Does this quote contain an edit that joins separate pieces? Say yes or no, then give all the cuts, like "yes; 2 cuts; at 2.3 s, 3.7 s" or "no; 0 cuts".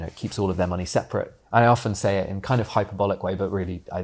yes; 1 cut; at 1.4 s